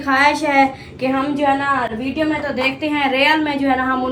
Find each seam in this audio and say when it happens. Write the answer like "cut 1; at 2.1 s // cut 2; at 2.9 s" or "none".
none